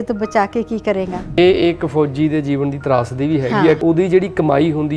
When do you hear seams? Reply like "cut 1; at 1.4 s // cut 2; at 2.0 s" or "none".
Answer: cut 1; at 1.4 s // cut 2; at 3.8 s